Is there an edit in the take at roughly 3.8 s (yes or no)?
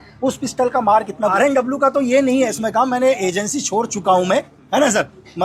no